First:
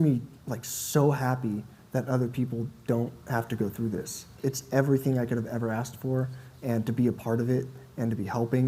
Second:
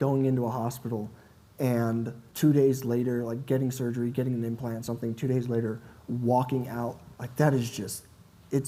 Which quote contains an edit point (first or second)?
first